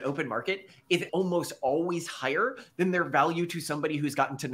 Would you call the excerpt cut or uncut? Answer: cut